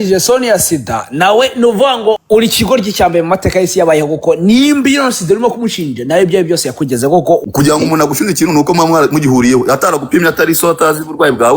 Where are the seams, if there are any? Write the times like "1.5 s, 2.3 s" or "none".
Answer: 2.2 s